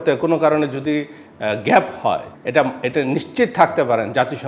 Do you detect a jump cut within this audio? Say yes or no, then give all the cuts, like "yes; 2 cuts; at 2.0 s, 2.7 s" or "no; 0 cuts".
yes; 1 cut; at 2.3 s